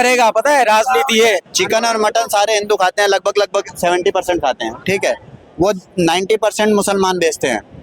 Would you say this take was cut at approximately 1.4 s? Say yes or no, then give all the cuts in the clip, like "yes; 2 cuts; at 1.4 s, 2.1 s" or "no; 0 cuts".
yes; 1 cut; at 1.4 s